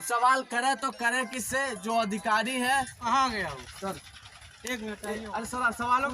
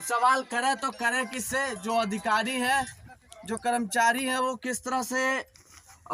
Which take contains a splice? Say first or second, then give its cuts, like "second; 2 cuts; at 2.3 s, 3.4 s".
first; 1 cut; at 3.0 s